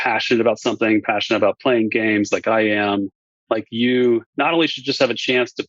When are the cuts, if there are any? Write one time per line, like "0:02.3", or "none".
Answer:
0:03.2